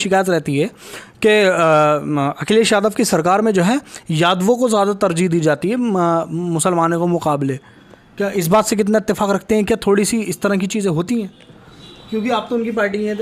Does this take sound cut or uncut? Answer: uncut